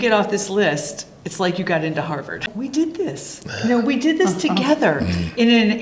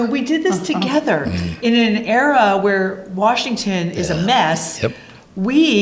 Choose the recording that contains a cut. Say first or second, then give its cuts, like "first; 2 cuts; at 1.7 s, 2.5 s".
first; 1 cut; at 2.5 s